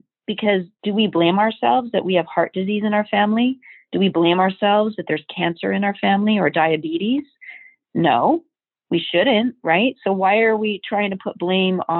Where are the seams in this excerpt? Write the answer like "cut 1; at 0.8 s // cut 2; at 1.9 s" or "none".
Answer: none